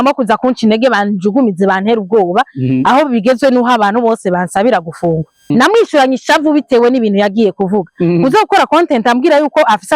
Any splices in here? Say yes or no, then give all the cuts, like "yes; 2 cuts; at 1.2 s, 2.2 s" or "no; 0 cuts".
yes; 1 cut; at 5.5 s